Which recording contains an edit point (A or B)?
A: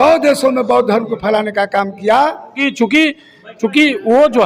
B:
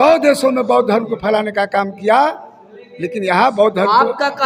A